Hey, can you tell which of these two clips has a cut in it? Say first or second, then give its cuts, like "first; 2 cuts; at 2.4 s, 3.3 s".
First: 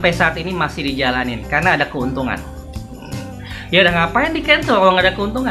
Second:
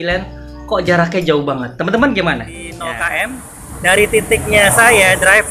second; 1 cut; at 2.8 s